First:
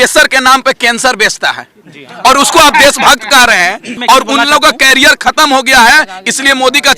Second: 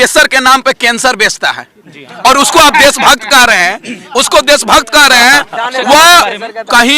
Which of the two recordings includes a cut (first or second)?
first